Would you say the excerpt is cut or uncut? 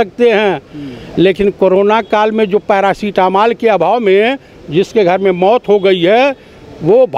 uncut